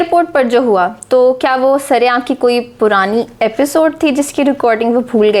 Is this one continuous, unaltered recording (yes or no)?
yes